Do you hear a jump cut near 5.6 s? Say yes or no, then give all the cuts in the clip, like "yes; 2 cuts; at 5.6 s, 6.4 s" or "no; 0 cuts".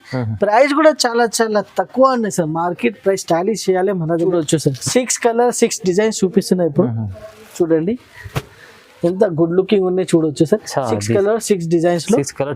no; 1 cut; at 4.3 s